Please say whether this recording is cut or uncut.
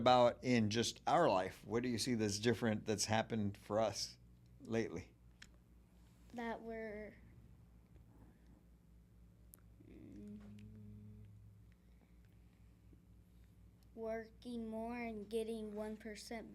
uncut